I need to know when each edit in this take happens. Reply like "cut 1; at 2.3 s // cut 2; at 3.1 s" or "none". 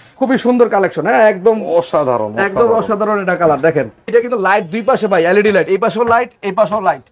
cut 1; at 4.1 s